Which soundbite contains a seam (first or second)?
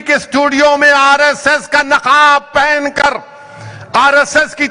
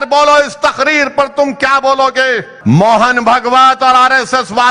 second